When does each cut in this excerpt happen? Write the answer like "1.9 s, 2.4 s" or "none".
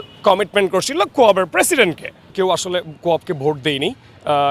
2.2 s